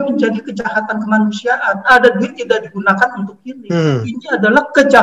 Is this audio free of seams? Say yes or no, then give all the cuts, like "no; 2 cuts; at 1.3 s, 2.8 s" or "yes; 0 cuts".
yes; 0 cuts